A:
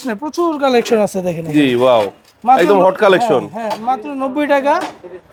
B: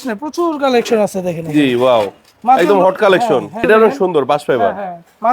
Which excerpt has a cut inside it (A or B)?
B